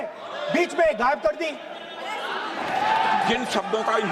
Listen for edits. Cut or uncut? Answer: cut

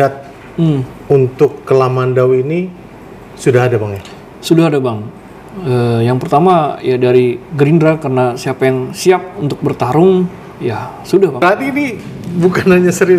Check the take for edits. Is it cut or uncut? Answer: cut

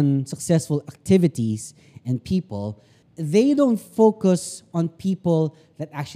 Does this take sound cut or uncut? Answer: uncut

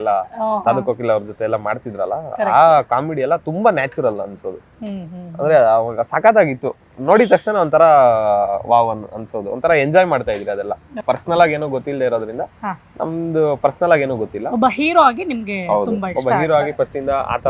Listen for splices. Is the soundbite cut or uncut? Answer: cut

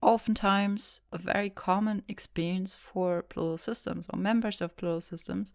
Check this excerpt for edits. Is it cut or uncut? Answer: cut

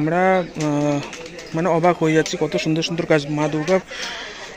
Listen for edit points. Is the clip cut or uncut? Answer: uncut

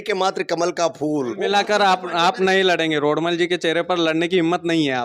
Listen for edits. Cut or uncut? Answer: cut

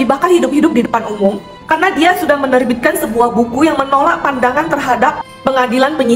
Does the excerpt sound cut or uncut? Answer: uncut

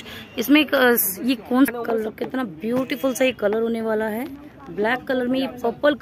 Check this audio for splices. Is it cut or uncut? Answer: cut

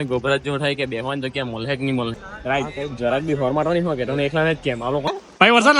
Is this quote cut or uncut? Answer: cut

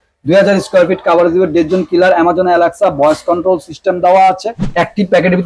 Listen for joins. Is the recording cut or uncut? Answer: cut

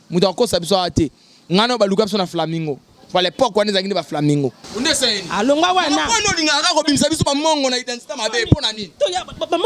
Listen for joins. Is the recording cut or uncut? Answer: cut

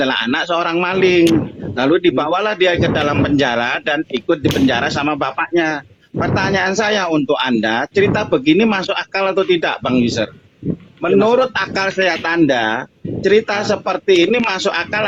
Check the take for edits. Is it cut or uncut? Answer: uncut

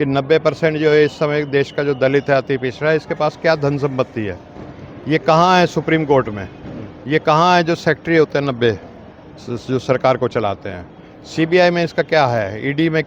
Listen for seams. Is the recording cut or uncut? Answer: uncut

